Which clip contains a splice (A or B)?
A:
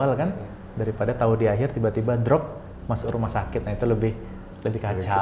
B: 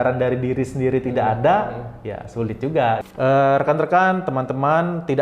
B